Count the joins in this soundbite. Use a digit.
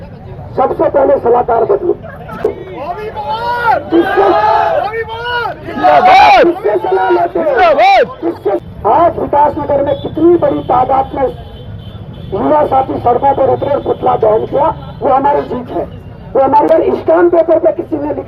3